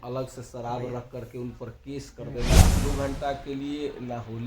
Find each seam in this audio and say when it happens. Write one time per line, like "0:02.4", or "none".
0:02.8